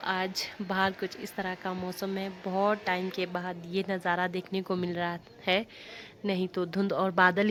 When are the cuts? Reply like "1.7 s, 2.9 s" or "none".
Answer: none